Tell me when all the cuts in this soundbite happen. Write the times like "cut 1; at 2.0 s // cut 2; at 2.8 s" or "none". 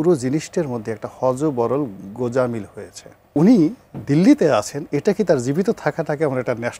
cut 1; at 3.3 s